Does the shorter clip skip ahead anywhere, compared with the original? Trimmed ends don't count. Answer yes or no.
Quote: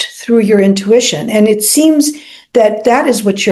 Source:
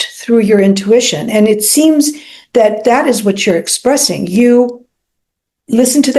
no